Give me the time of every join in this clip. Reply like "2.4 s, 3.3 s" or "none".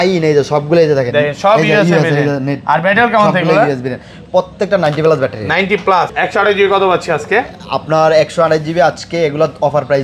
6.1 s